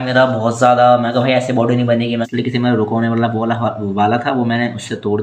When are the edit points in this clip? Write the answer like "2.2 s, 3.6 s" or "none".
2.3 s